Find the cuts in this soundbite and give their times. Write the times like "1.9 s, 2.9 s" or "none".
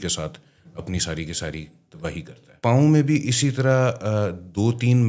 2.6 s